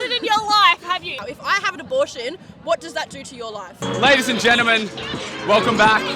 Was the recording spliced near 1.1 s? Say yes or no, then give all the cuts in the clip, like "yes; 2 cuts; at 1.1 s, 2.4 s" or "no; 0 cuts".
yes; 2 cuts; at 1.1 s, 3.8 s